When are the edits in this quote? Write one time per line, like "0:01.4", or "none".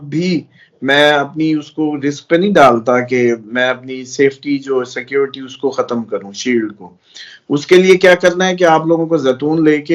none